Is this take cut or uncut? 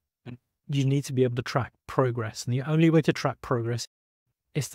uncut